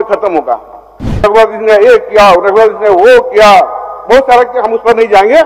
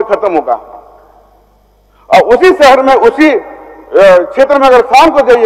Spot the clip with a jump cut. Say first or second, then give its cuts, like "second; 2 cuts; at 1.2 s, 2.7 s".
first; 1 cut; at 1.2 s